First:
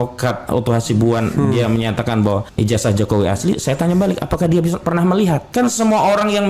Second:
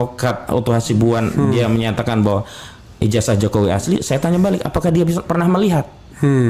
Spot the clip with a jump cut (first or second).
first